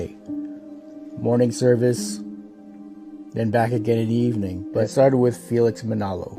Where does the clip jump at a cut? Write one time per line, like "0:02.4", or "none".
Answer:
0:04.9